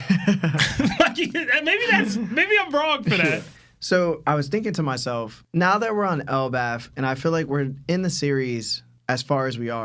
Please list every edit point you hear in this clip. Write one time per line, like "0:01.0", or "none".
0:03.5